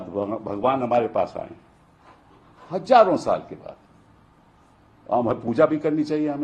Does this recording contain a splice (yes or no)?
no